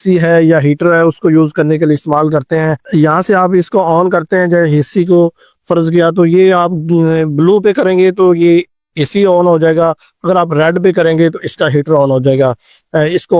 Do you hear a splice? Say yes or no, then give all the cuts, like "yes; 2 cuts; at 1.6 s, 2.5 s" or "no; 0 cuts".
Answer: no; 0 cuts